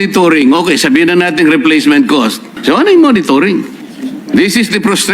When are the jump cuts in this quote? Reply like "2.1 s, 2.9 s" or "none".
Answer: 2.5 s, 3.8 s